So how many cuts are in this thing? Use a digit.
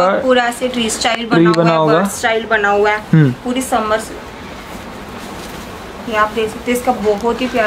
0